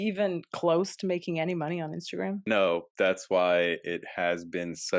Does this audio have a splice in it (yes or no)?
no